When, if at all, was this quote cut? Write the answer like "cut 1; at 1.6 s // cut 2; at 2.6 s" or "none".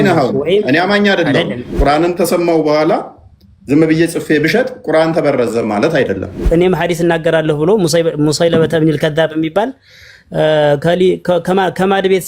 cut 1; at 1.6 s // cut 2; at 6.4 s